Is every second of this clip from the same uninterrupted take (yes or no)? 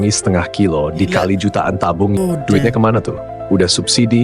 no